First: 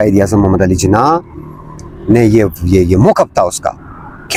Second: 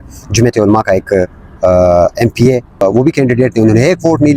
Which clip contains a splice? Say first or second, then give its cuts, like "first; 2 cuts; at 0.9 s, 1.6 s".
second; 1 cut; at 2.8 s